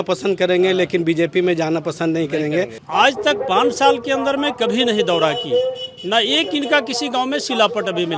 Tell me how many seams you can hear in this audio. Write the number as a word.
one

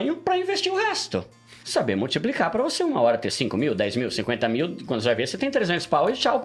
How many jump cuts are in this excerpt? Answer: one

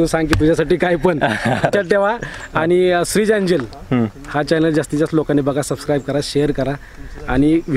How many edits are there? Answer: one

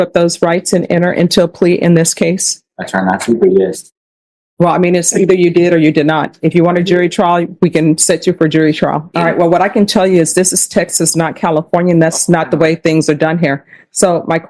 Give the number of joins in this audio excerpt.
one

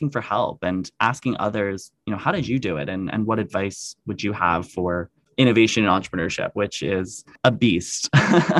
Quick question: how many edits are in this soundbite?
two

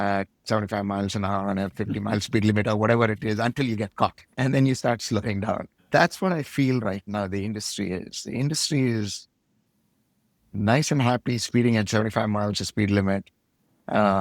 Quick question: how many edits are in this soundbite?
two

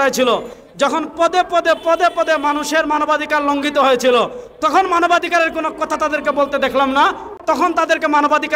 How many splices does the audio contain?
one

